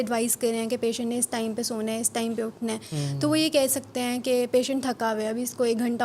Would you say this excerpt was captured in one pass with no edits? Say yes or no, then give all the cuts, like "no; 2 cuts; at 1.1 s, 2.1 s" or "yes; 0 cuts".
yes; 0 cuts